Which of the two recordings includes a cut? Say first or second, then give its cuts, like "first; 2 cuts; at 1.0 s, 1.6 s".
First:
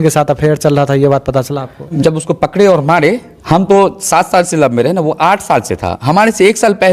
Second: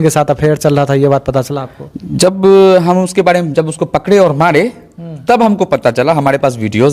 first; 2 cuts; at 1.9 s, 3.3 s